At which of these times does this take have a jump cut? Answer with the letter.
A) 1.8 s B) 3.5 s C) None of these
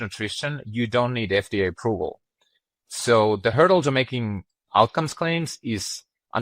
B